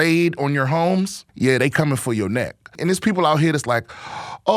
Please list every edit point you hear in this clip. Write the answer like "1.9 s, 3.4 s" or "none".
1.2 s, 2.8 s